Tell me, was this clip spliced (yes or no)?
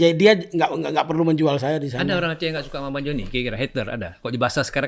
no